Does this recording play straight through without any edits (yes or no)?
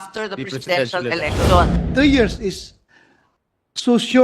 no